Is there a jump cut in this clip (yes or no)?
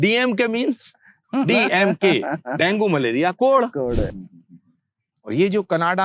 yes